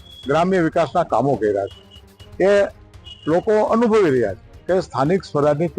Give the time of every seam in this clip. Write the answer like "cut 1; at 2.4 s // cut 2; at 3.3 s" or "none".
cut 1; at 4.5 s